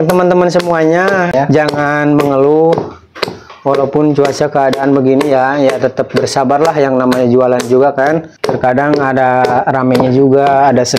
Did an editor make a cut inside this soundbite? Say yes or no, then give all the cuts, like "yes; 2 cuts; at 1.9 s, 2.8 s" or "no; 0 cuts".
yes; 2 cuts; at 1.3 s, 8.3 s